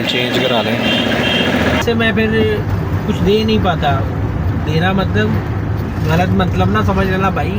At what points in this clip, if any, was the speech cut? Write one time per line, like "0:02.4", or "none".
0:01.8